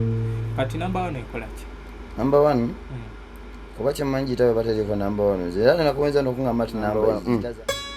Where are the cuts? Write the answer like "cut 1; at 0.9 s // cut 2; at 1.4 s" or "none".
cut 1; at 6.9 s